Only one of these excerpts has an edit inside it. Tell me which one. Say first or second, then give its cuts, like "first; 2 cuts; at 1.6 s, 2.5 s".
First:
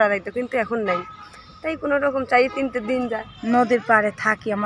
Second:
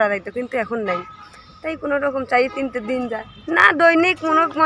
first; 1 cut; at 3.3 s